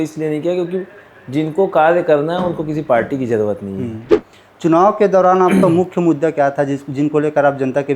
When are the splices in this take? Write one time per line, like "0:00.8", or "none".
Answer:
0:04.1